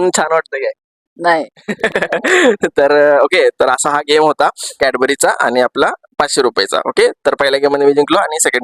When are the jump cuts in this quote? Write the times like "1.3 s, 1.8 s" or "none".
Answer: none